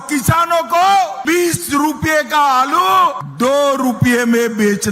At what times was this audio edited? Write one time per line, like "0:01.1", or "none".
0:01.2
0:03.2

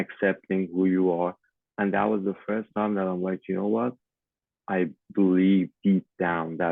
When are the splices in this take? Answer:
0:01.5

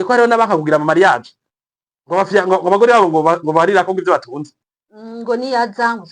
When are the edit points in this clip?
none

